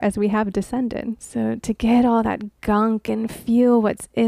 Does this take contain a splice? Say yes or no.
no